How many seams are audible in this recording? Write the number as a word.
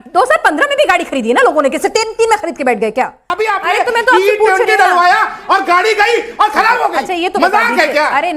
one